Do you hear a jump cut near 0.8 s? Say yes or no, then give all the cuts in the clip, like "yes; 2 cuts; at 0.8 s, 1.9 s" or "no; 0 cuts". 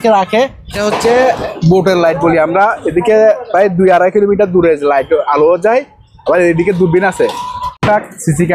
yes; 2 cuts; at 0.8 s, 7.6 s